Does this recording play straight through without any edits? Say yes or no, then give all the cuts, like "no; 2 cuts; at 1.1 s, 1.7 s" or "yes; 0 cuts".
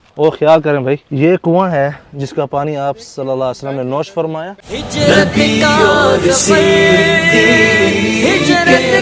no; 2 cuts; at 1.1 s, 4.6 s